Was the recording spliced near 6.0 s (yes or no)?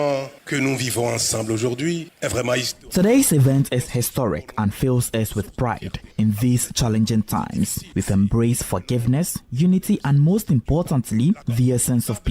yes